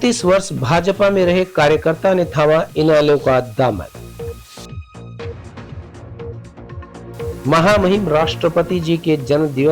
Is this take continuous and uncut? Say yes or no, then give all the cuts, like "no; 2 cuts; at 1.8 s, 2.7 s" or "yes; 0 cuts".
yes; 0 cuts